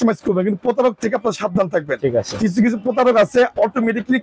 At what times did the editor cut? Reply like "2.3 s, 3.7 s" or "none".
none

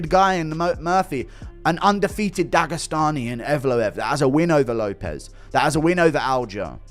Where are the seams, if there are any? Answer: none

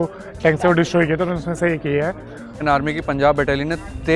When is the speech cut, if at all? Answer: 2.6 s

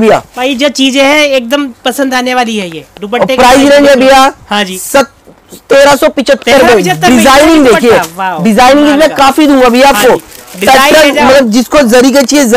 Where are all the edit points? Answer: none

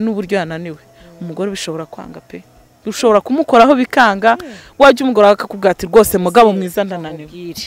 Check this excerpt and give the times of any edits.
none

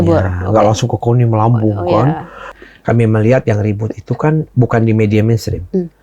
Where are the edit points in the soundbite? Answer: 2.6 s

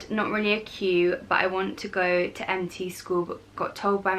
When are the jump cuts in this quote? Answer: none

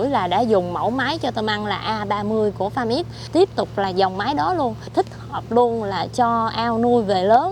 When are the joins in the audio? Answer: 3.2 s, 4.9 s

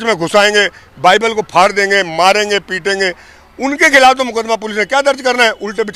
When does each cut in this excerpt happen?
none

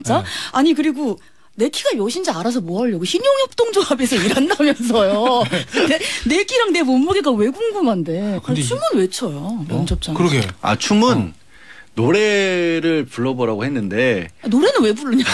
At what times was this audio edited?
8.4 s

